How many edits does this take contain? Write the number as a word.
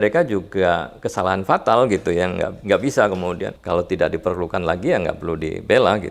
one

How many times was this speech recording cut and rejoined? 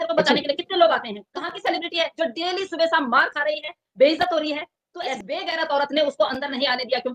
two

